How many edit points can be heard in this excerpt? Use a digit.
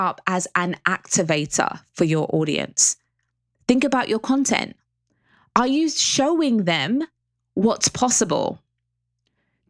1